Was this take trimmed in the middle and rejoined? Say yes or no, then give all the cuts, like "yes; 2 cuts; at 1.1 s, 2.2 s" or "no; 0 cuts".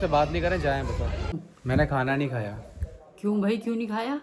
yes; 1 cut; at 1.3 s